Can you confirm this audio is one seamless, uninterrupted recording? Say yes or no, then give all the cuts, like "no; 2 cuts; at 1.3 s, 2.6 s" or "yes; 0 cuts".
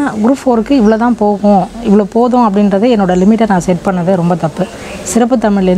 yes; 0 cuts